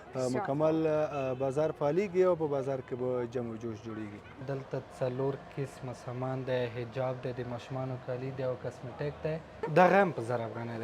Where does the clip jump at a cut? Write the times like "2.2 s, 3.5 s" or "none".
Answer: 4.4 s, 9.7 s